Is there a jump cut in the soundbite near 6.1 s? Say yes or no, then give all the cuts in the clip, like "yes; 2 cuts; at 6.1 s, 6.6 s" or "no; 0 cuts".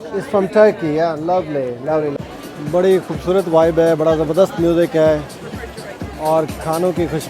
no; 1 cut; at 2.3 s